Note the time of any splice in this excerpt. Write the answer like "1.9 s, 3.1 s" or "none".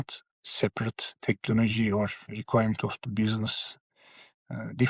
1.1 s, 2.3 s